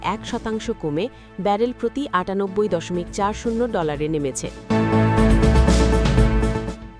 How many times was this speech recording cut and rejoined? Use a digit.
1